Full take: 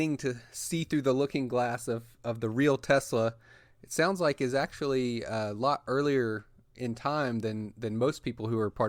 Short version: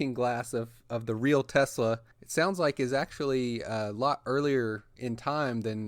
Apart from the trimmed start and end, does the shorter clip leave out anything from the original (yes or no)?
yes